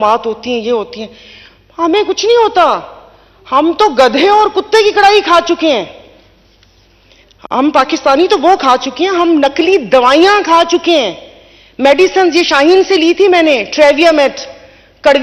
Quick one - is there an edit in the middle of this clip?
no; 0 cuts

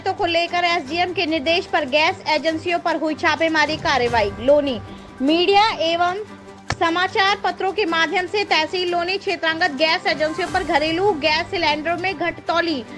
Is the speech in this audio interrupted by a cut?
no; 0 cuts

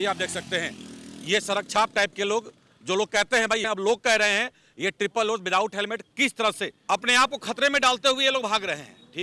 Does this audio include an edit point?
yes; 2 cuts; at 3.6 s, 6.7 s

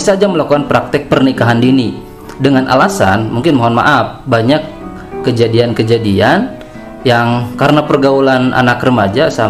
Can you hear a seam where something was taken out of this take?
no; 0 cuts

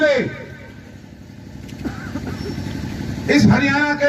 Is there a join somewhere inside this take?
no; 0 cuts

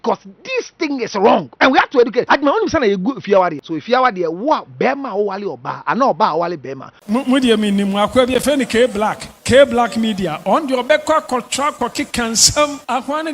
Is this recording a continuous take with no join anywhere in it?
no; 4 cuts; at 1.5 s, 2.3 s, 3.7 s, 6.9 s

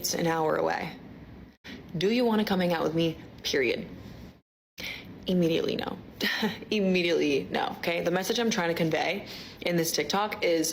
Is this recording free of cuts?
no; 1 cut; at 6.2 s

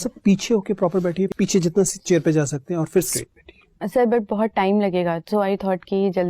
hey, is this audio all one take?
no; 2 cuts; at 1.3 s, 3.1 s

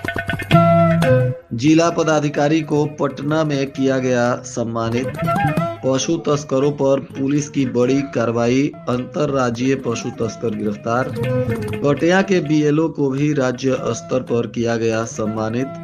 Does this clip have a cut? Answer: yes; 1 cut; at 1.4 s

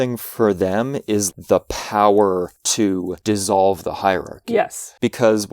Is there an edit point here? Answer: yes; 1 cut; at 1.3 s

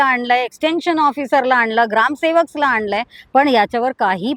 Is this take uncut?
yes; 0 cuts

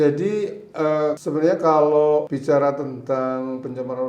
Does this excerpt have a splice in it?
yes; 2 cuts; at 1.2 s, 2.3 s

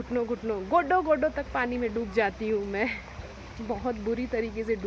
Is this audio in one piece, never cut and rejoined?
yes; 0 cuts

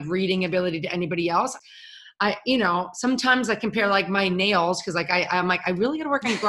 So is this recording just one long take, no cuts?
no; 1 cut; at 1.6 s

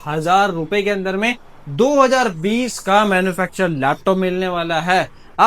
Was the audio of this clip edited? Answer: no; 0 cuts

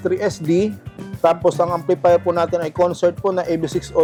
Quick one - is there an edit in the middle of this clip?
no; 0 cuts

